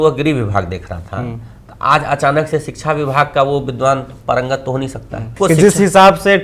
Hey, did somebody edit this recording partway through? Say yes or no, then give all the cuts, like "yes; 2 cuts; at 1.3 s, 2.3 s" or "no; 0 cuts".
yes; 1 cut; at 5.3 s